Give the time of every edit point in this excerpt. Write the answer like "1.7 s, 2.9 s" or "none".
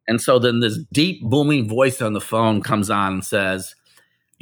0.8 s, 2.7 s